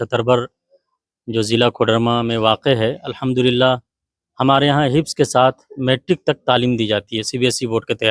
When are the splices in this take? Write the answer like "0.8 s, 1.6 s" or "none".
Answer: none